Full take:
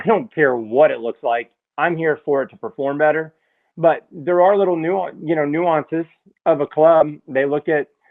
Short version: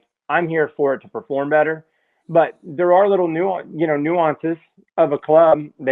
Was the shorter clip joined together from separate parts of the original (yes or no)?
no